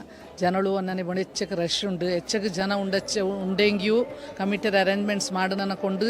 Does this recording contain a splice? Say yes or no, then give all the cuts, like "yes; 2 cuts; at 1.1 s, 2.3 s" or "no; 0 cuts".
no; 0 cuts